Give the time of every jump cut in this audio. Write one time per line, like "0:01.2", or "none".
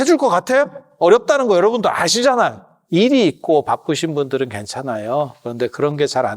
0:02.7